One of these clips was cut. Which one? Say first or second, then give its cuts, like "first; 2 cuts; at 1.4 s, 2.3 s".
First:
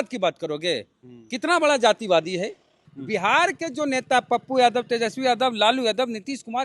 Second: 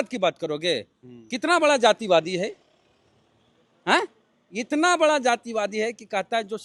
first; 1 cut; at 2.9 s